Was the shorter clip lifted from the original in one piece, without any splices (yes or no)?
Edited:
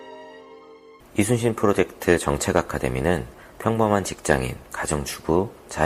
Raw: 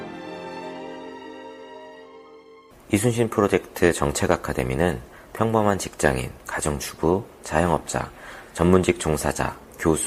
no